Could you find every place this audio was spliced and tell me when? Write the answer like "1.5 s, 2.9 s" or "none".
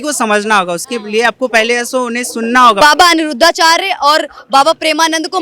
2.8 s